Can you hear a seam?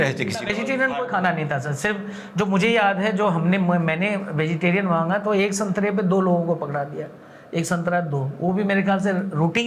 no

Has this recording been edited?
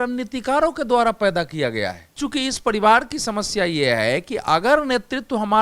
yes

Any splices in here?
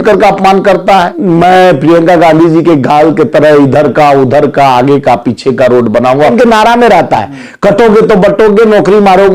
yes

